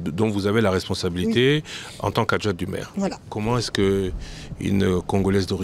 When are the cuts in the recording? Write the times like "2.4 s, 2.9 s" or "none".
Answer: 3.3 s